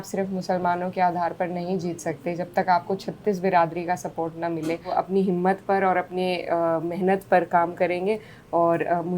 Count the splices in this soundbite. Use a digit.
1